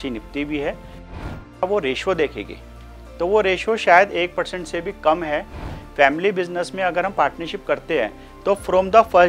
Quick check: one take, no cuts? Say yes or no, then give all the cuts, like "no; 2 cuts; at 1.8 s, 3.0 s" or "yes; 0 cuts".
no; 1 cut; at 5.7 s